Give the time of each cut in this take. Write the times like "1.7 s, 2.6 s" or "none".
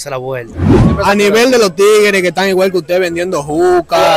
0.9 s